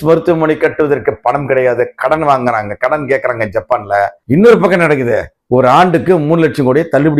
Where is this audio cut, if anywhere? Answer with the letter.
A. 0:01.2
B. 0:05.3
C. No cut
C